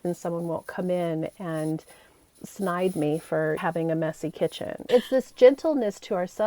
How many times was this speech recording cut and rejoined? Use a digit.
1